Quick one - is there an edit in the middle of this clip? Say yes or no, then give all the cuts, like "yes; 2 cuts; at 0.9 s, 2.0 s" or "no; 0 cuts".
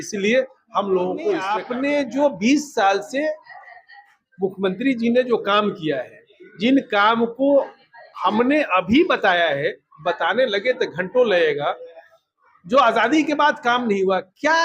yes; 1 cut; at 1.6 s